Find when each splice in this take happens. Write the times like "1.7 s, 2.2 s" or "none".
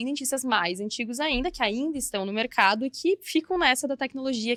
none